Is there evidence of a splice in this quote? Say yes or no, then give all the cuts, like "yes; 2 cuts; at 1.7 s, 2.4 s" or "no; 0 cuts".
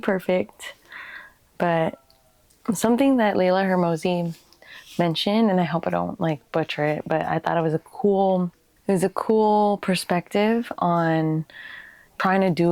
no; 0 cuts